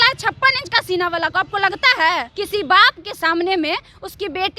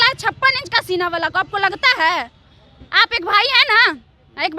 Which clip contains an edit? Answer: first; 1 cut; at 2.3 s

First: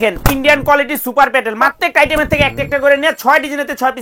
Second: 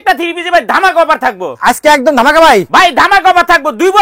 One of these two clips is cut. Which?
first; 1 cut; at 1.7 s

